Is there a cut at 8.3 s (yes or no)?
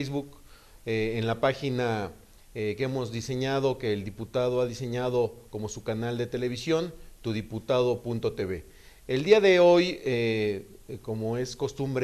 yes